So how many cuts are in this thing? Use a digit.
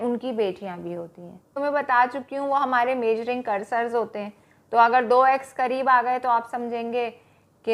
1